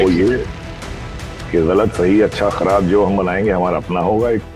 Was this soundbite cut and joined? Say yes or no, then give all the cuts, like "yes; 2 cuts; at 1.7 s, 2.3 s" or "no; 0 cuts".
no; 0 cuts